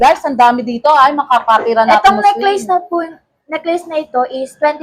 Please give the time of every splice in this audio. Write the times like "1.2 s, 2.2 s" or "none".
none